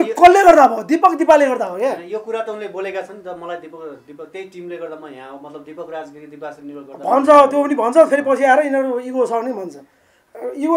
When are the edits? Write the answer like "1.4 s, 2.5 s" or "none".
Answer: none